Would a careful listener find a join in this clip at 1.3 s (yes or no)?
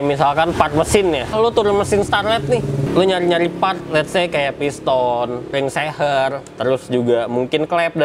yes